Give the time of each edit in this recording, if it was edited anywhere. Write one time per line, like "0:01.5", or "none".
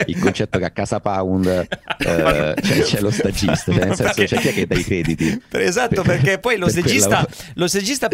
none